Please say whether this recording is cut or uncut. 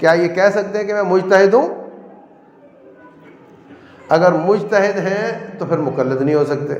uncut